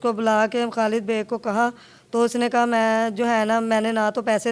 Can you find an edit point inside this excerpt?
no; 0 cuts

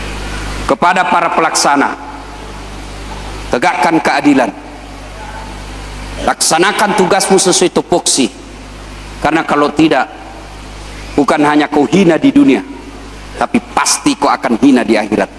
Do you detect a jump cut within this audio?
no; 0 cuts

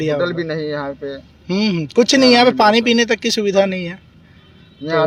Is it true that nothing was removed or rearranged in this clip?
yes; 0 cuts

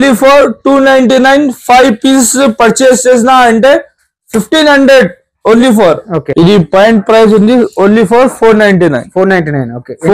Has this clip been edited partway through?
yes; 1 cut; at 6.2 s

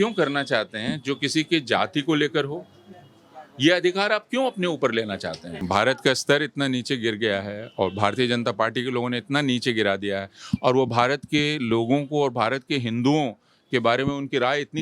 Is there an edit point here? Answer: yes; 1 cut; at 5.6 s

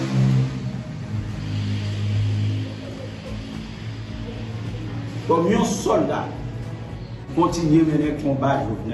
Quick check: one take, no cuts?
no; 1 cut; at 7.3 s

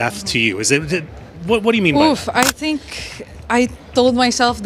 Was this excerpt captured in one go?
no; 1 cut; at 1.9 s

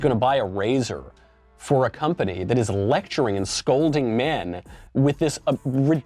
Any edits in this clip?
no; 0 cuts

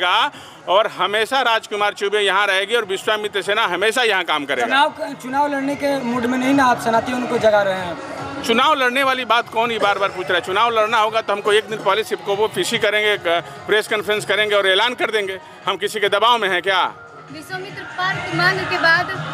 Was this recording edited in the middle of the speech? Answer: no; 0 cuts

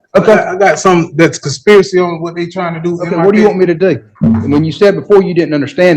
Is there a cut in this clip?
yes; 1 cut; at 4.4 s

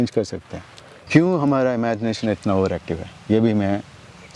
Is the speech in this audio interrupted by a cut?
yes; 1 cut; at 0.9 s

